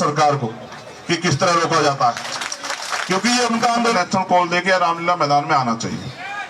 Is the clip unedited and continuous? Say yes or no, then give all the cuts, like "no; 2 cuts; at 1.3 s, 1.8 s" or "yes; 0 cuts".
no; 1 cut; at 3.9 s